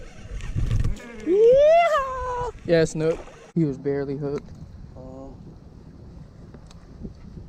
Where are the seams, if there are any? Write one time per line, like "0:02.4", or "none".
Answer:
0:03.4